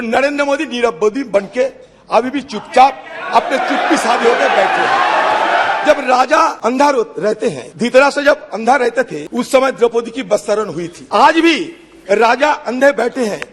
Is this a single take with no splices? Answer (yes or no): no